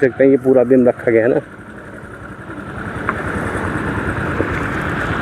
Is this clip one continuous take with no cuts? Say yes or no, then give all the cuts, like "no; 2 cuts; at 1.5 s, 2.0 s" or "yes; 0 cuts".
yes; 0 cuts